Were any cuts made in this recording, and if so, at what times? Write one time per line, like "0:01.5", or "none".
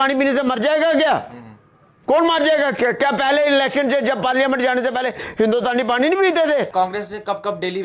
0:06.7